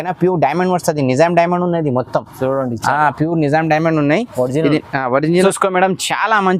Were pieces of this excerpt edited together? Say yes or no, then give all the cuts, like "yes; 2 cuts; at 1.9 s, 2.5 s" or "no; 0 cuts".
yes; 1 cut; at 5.4 s